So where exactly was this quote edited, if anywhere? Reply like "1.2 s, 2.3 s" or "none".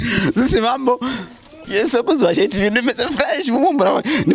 1.6 s